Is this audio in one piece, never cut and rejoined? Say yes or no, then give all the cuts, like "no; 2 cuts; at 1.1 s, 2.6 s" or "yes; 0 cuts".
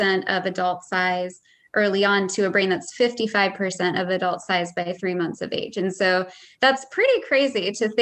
yes; 0 cuts